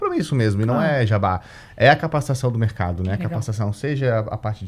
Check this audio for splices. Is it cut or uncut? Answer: uncut